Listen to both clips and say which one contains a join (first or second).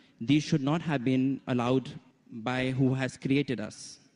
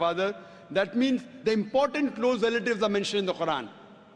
first